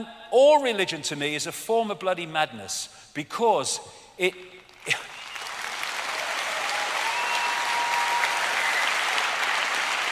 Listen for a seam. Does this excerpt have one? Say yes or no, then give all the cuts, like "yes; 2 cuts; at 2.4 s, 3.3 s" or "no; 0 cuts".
no; 0 cuts